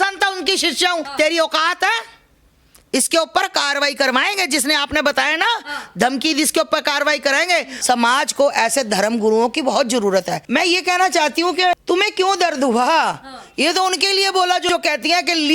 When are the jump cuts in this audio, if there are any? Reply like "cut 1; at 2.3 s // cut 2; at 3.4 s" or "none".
cut 1; at 7.7 s // cut 2; at 10.4 s // cut 3; at 11.8 s